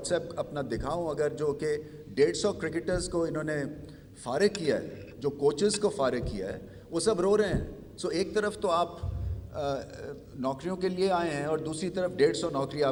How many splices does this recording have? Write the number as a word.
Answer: zero